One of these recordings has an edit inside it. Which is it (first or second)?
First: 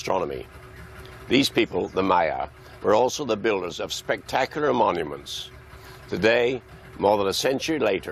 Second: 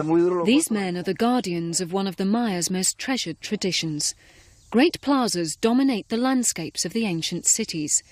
first